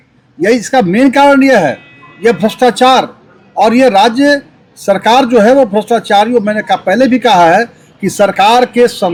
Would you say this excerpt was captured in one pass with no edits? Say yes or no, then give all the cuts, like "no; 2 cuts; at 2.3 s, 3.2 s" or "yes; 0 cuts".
yes; 0 cuts